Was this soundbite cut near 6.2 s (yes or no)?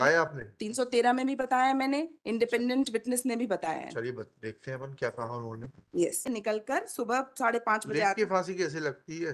yes